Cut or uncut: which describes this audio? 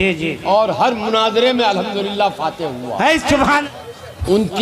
cut